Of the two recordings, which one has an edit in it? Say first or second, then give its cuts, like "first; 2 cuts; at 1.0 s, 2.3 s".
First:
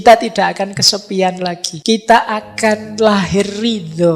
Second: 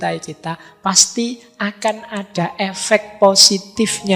first; 1 cut; at 1.7 s